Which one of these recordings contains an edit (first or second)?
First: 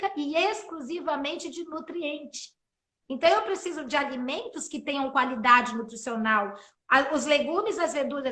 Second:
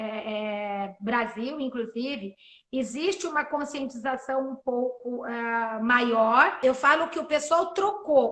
second